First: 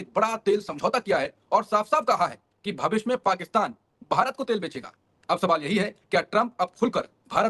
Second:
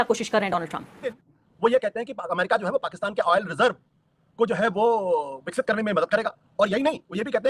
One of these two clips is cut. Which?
second; 1 cut; at 1.3 s

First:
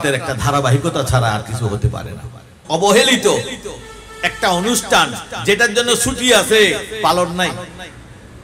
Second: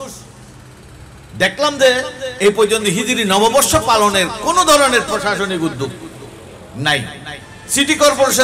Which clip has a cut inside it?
first; 1 cut; at 2.6 s

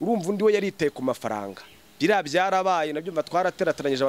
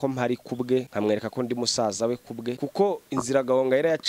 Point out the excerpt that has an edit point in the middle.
second; 2 cuts; at 0.9 s, 2.6 s

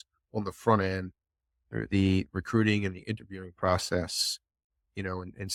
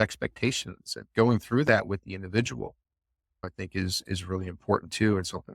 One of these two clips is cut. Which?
second; 1 cut; at 3.5 s

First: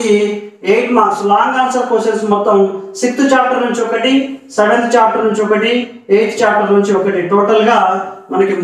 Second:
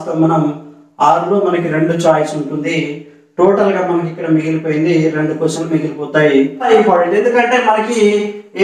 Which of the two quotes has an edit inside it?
second; 1 cut; at 6.7 s

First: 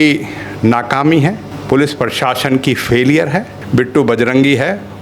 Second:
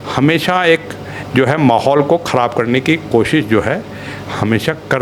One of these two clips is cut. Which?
first; 2 cuts; at 1.5 s, 3.5 s

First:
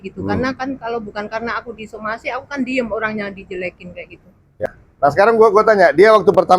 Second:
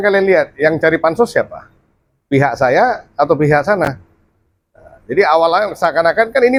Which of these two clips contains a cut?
first; 1 cut; at 4.6 s

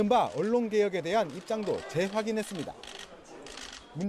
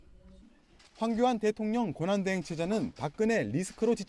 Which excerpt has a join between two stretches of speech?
second; 1 cut; at 2.2 s

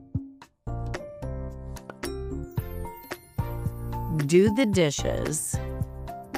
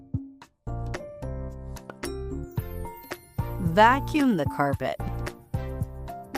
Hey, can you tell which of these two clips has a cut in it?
second; 2 cuts; at 3.6 s, 5.2 s

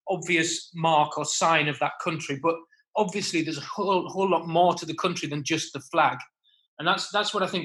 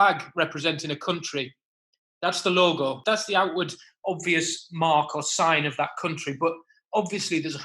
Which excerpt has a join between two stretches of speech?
second; 1 cut; at 3.0 s

